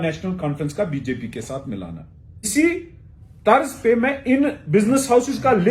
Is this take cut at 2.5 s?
yes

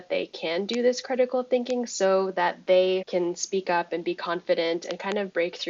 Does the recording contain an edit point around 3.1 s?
yes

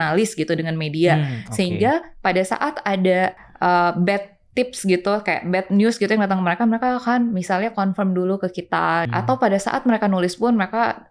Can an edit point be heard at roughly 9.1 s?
yes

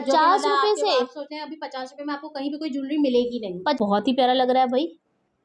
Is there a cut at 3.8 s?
yes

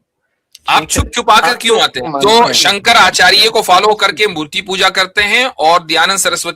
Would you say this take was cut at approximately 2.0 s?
yes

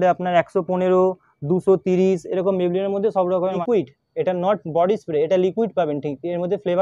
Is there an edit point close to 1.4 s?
no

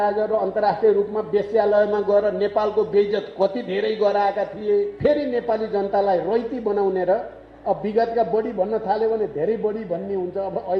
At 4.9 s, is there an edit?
yes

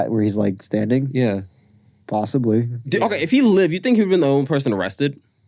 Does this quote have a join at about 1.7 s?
no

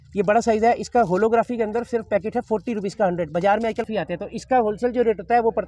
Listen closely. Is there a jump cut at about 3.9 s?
yes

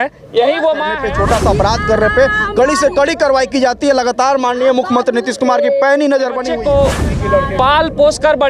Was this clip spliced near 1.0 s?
yes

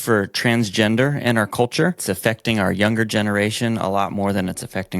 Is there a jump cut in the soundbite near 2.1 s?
yes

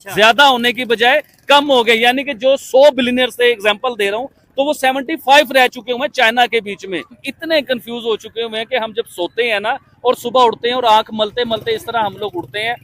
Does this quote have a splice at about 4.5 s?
no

